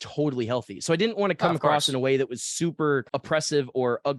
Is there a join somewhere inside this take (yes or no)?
no